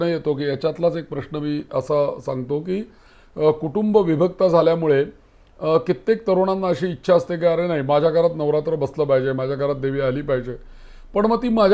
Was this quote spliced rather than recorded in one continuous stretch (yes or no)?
no